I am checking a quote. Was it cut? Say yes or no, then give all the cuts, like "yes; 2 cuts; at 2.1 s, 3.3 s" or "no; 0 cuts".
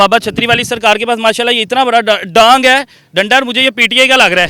no; 0 cuts